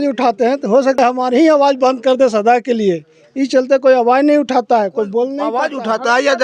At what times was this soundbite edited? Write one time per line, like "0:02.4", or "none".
0:05.4